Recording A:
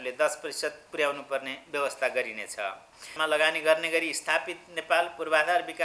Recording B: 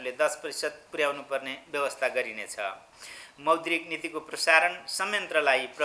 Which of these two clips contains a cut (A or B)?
A